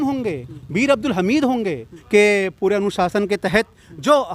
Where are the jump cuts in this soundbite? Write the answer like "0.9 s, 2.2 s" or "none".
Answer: 2.0 s